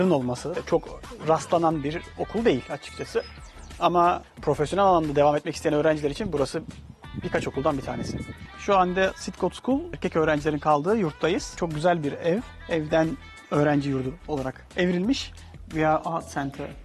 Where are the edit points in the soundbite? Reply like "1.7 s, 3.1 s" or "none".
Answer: 8.4 s, 15.4 s